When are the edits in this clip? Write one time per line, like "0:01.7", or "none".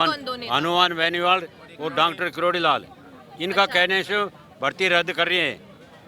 none